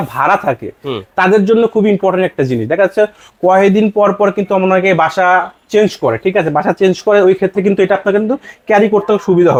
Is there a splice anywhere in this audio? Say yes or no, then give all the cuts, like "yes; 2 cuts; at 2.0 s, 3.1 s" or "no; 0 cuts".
no; 0 cuts